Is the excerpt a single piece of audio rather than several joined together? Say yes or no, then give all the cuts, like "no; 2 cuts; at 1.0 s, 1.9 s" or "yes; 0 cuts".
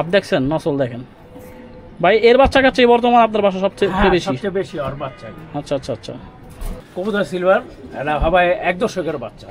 no; 1 cut; at 6.8 s